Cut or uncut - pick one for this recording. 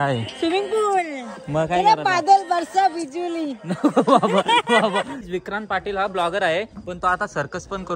cut